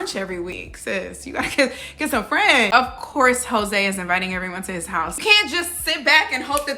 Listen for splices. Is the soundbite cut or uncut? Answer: cut